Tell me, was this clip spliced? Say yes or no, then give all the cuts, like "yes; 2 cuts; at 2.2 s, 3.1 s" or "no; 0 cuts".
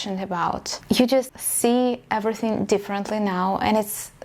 yes; 2 cuts; at 0.8 s, 1.4 s